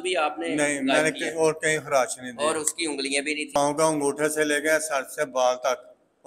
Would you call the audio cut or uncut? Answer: cut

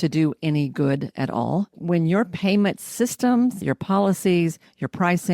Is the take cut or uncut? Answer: cut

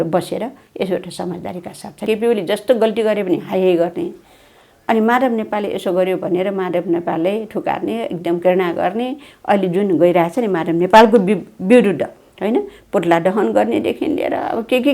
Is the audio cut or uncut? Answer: cut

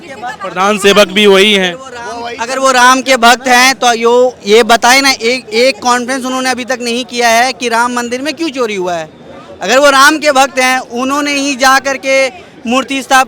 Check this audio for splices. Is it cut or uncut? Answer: uncut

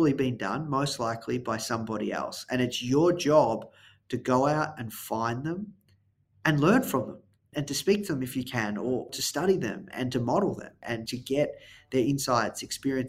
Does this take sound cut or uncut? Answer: cut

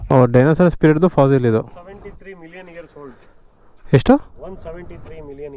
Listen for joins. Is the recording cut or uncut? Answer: uncut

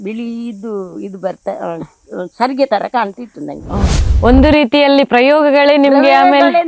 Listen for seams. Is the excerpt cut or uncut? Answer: cut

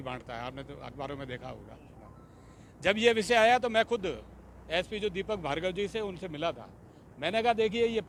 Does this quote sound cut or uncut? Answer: uncut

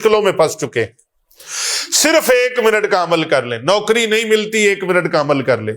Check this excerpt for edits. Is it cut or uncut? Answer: uncut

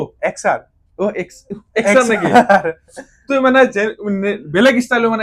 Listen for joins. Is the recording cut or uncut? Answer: uncut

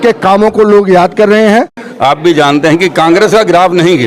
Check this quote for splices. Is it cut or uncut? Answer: cut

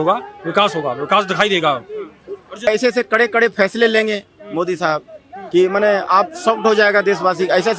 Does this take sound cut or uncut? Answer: cut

